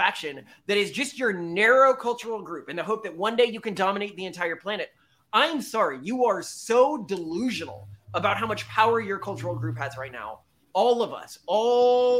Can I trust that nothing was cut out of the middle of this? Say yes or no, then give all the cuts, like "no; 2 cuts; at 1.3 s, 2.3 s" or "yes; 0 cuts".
yes; 0 cuts